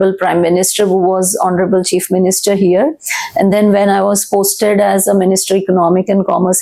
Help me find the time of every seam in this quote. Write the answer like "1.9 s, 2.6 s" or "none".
none